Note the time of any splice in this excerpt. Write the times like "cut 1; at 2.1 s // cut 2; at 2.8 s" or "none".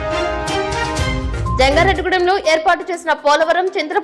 cut 1; at 1.6 s